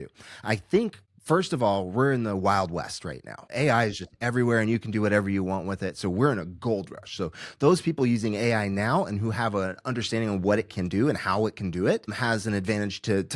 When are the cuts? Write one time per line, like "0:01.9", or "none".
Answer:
0:01.1
0:03.4
0:12.1